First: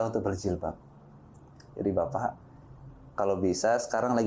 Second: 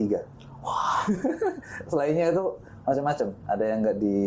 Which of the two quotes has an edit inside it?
second; 1 cut; at 3.4 s

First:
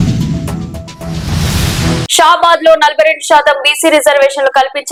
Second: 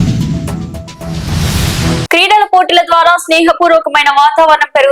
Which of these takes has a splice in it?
second; 1 cut; at 2.1 s

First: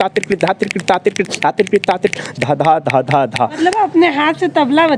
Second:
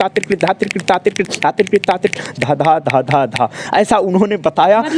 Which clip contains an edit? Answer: first; 1 cut; at 3.5 s

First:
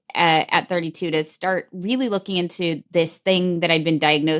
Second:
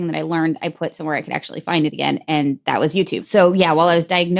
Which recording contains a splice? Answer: second; 1 cut; at 3.2 s

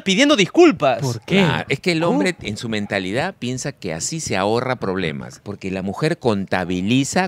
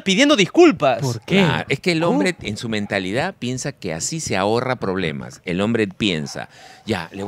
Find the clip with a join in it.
first; 1 cut; at 5.3 s

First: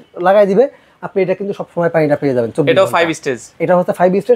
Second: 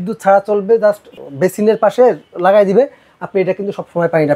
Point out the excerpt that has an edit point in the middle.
second; 1 cut; at 1.1 s

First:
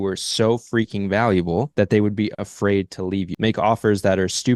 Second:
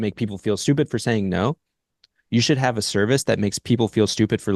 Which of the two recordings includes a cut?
first; 2 cuts; at 1.7 s, 3.3 s

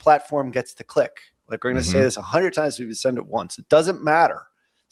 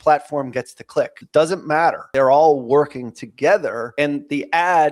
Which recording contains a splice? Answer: second; 3 cuts; at 1.2 s, 2.1 s, 3.8 s

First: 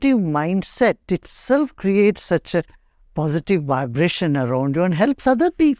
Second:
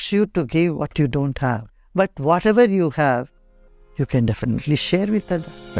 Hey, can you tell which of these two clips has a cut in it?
second; 1 cut; at 1.8 s

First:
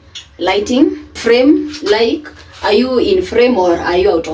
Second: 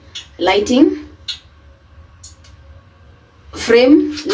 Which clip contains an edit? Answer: first; 1 cut; at 1.1 s

